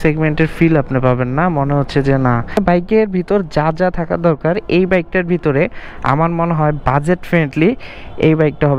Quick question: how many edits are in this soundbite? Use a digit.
1